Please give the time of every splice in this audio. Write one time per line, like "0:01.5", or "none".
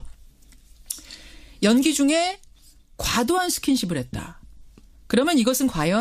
none